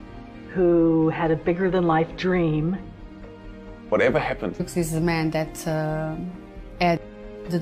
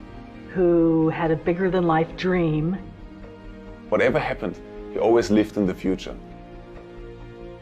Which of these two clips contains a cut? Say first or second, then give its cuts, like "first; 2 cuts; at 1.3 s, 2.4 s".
second; 1 cut; at 4.6 s